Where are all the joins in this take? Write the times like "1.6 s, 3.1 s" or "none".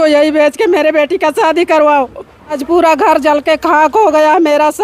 2.6 s